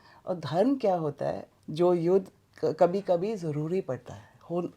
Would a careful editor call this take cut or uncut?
cut